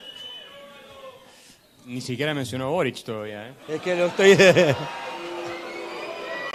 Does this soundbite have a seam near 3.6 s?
no; 0 cuts

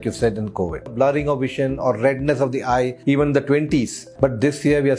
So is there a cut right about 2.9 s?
yes; 3 cuts; at 0.9 s, 2.9 s, 4.0 s

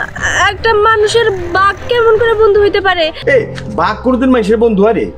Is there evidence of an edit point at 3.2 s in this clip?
yes; 1 cut; at 3.2 s

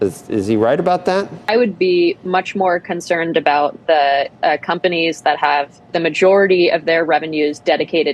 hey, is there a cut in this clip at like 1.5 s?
yes; 1 cut; at 1.5 s

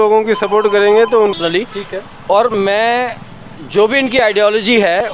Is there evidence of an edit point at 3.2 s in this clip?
no; 1 cut; at 1.3 s

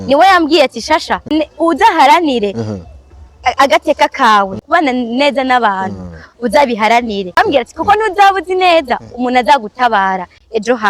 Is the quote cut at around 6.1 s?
no; 3 cuts; at 1.3 s, 4.6 s, 7.4 s

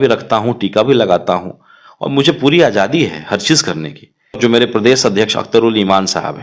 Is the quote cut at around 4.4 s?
yes; 1 cut; at 4.4 s

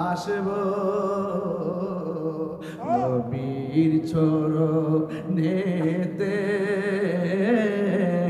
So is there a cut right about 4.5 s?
no; 0 cuts

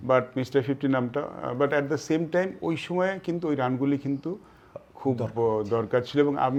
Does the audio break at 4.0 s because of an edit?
no; 0 cuts

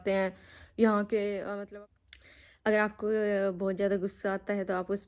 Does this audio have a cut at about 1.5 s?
yes; 1 cut; at 1.5 s

